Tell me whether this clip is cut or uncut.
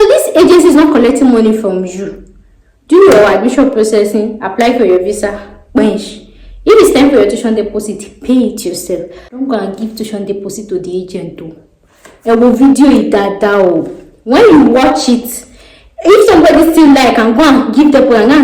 cut